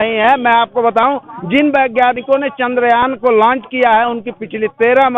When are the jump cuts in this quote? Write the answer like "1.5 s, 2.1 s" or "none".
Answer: none